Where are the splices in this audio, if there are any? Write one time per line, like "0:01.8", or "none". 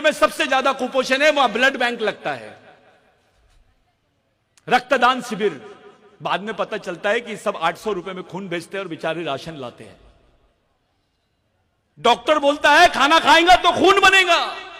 none